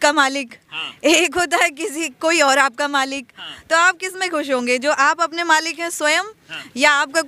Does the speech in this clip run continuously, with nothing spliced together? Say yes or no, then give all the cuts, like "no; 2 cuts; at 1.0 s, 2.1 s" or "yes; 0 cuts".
yes; 0 cuts